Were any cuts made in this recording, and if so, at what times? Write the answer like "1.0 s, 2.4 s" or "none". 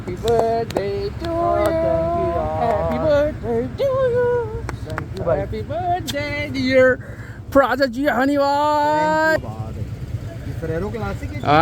9.4 s